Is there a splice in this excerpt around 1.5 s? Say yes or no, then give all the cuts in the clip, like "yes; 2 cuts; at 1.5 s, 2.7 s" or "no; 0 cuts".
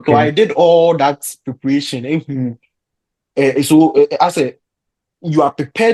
no; 0 cuts